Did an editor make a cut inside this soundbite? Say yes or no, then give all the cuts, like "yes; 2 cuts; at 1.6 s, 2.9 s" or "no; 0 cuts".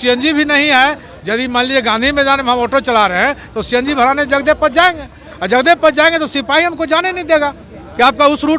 no; 0 cuts